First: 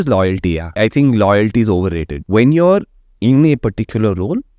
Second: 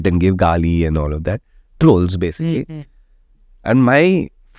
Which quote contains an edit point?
first; 2 cuts; at 0.8 s, 2.1 s

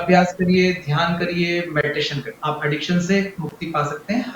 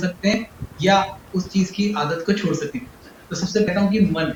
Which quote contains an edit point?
first; 1 cut; at 2.3 s

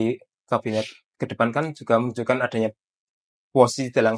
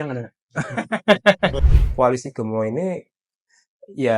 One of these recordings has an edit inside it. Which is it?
second; 1 cut; at 1.7 s

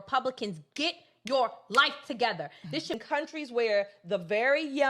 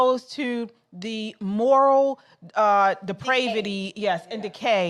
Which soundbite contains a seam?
first; 1 cut; at 3.0 s

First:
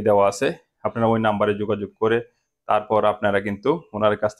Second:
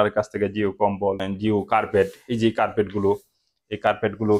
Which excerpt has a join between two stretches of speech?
second; 1 cut; at 1.3 s

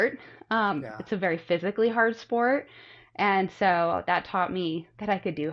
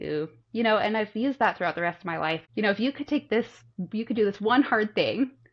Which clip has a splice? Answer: second; 1 cut; at 2.4 s

